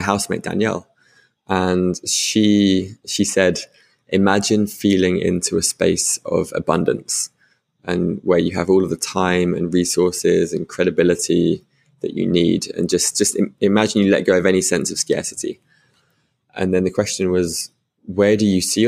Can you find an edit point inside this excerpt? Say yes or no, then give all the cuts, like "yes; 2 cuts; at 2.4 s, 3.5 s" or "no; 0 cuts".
no; 0 cuts